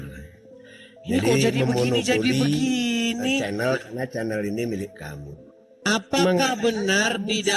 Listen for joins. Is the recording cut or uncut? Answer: cut